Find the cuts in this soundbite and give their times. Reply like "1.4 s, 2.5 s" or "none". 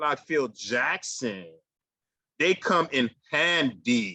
none